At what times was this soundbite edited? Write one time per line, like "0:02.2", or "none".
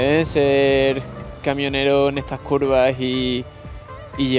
none